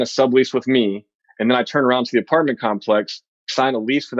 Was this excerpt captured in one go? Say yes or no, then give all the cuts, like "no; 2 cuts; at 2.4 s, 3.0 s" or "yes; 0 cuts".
yes; 0 cuts